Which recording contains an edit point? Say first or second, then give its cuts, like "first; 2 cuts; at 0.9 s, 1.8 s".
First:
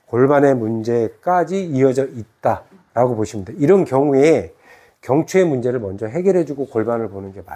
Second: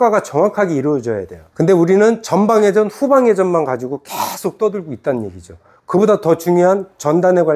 second; 1 cut; at 1.4 s